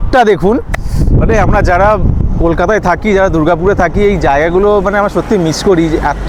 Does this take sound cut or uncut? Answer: uncut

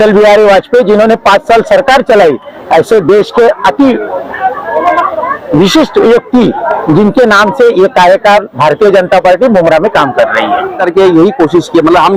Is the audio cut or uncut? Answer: cut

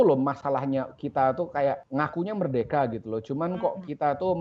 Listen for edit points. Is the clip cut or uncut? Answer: cut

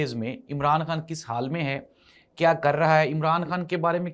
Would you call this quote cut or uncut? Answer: uncut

